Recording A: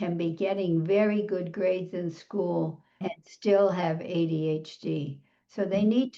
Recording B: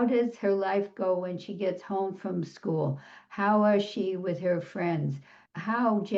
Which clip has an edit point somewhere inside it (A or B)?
A